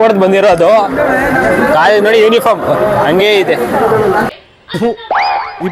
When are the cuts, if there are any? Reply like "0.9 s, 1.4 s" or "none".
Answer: none